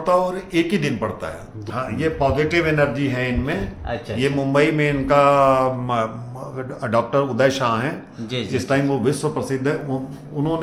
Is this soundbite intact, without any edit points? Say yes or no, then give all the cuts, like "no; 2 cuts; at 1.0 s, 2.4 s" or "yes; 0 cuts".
no; 1 cut; at 1.6 s